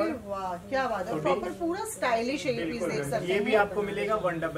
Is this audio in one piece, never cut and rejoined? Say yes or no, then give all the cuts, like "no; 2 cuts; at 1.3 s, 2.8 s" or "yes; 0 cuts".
yes; 0 cuts